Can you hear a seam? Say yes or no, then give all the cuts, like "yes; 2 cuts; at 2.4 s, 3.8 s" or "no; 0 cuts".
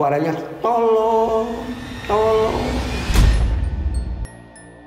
no; 0 cuts